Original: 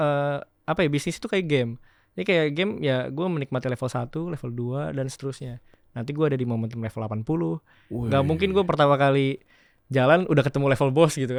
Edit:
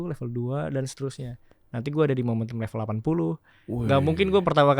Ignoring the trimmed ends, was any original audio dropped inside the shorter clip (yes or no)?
no